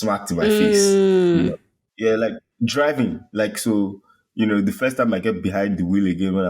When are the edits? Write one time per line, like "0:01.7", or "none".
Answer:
0:02.0